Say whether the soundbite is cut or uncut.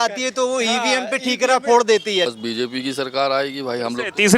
cut